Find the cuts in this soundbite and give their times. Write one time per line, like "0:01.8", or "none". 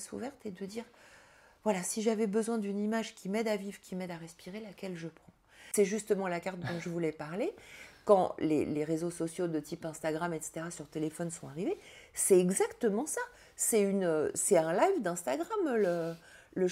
0:05.6